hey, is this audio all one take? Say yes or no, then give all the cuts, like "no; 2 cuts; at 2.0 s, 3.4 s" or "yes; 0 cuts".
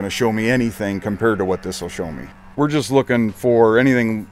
no; 1 cut; at 2.3 s